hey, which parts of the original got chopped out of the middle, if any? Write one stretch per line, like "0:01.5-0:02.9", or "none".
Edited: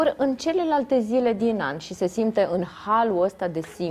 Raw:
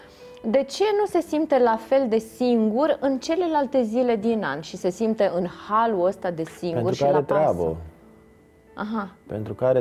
none

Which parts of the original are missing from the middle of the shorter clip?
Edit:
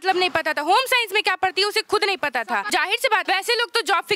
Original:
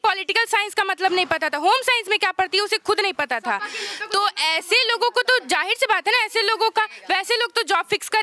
0:04.1-0:06.9

